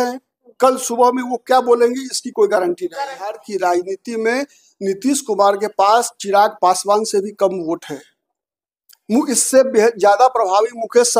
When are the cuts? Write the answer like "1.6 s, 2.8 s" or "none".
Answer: 3.5 s